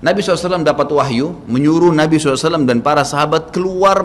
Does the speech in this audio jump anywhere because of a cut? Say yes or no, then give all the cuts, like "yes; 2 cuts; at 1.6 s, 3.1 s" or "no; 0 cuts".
no; 0 cuts